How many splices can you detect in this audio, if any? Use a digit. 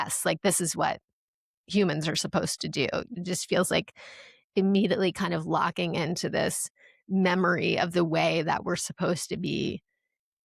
1